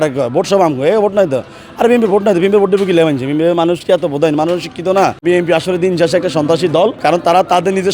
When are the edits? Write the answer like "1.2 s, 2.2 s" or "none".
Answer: 5.2 s, 7.0 s